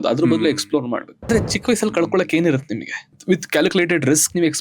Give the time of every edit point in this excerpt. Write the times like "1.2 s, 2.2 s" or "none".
1.3 s, 3.2 s